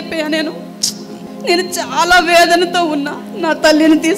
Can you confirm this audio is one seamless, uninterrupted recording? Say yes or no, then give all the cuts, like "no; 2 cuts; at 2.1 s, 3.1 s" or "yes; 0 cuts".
no; 1 cut; at 1.2 s